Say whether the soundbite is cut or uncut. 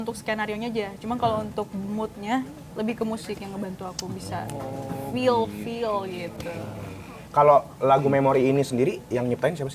uncut